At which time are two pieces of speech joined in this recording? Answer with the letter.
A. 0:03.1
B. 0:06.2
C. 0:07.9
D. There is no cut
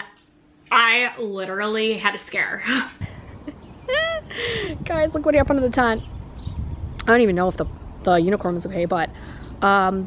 A